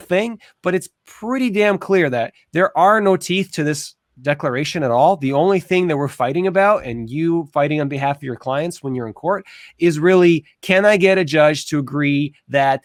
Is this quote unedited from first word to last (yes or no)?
yes